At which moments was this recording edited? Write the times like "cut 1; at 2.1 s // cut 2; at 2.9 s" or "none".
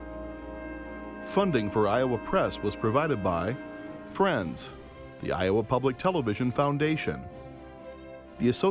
cut 1; at 1.3 s